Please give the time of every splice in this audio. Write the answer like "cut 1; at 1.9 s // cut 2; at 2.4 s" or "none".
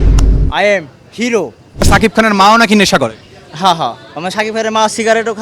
cut 1; at 1.9 s